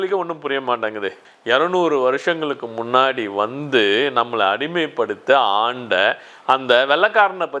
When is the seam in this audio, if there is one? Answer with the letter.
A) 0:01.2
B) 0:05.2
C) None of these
A